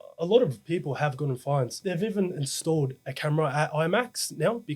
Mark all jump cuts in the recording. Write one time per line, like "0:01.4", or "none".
0:01.8